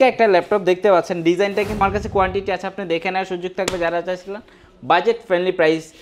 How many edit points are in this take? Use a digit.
1